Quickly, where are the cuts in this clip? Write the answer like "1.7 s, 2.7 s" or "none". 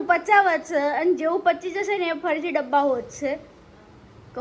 none